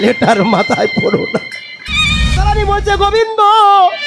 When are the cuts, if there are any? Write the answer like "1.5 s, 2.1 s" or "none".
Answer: 2.4 s